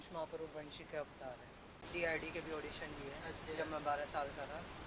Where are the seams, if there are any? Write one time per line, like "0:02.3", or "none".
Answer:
0:01.9